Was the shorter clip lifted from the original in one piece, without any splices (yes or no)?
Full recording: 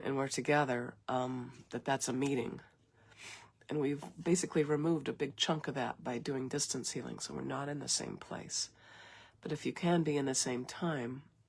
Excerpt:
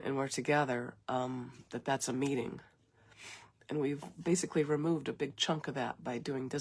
yes